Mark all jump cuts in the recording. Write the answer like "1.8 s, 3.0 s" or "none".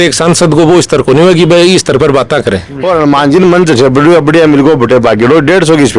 2.7 s